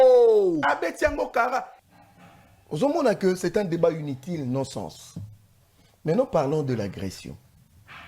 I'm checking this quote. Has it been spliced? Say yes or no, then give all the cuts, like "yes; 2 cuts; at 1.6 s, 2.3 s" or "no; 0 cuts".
yes; 1 cut; at 1.8 s